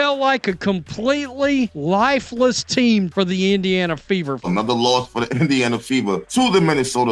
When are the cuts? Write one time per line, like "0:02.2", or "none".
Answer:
0:01.8
0:03.1
0:04.4
0:06.2